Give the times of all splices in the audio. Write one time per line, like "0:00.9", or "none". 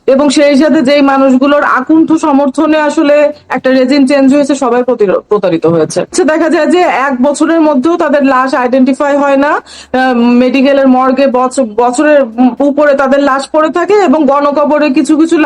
0:06.1

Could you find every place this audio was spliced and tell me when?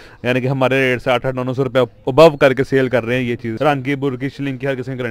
0:03.5

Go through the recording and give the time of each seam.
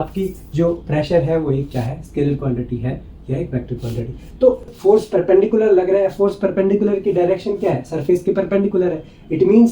0:04.7

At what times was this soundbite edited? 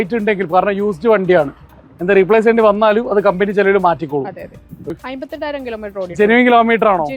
0:05.1

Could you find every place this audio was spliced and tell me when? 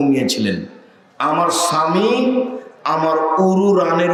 none

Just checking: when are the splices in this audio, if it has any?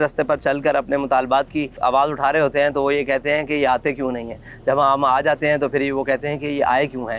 none

